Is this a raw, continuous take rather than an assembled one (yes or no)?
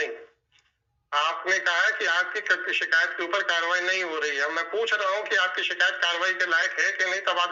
yes